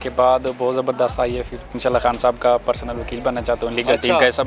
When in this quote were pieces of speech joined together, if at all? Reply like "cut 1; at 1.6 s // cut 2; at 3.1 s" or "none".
cut 1; at 1.8 s